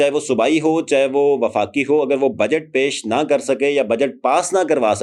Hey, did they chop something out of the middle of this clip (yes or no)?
no